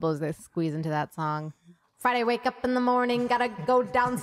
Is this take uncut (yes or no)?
yes